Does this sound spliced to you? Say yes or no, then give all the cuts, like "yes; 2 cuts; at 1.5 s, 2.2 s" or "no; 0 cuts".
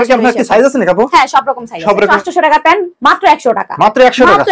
yes; 1 cut; at 2.1 s